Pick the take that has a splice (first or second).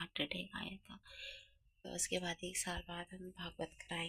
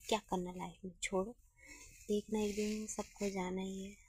first